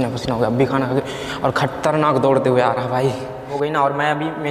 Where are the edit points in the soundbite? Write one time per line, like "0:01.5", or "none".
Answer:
0:03.5